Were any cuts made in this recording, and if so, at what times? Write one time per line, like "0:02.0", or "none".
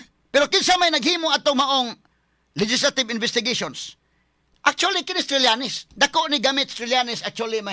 none